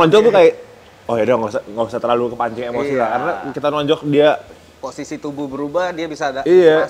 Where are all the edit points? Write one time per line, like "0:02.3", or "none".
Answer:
none